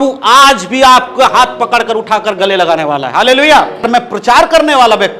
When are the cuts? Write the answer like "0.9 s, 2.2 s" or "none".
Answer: 3.9 s